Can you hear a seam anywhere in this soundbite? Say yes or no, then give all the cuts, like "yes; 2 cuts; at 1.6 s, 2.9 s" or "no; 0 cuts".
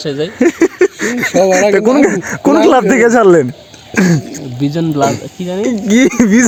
no; 0 cuts